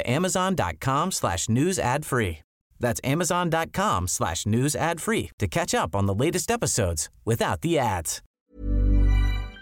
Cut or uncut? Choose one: cut